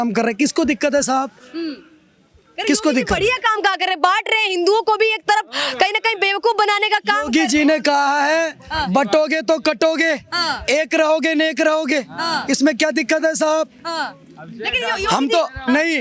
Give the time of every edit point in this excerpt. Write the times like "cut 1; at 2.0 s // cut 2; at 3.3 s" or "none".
none